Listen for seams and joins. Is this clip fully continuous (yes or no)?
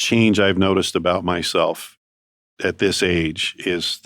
yes